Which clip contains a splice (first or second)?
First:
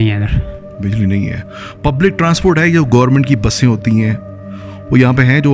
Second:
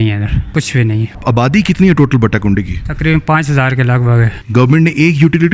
second